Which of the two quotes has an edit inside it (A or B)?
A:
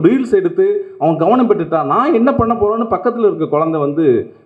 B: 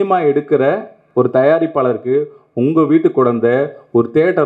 B